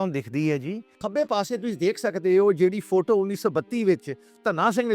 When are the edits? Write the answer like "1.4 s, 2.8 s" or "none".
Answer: 0.9 s